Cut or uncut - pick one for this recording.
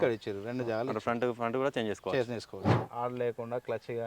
cut